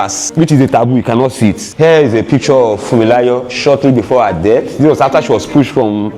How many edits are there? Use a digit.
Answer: 0